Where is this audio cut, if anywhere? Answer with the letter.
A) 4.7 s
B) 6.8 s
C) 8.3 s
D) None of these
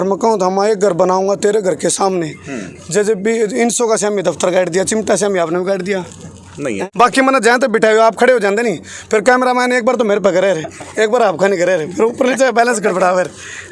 B